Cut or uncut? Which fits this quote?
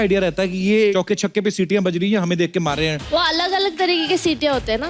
cut